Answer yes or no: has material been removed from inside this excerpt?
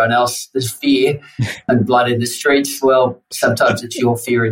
yes